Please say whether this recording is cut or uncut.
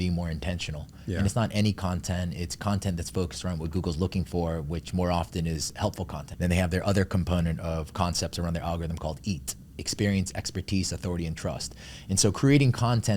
cut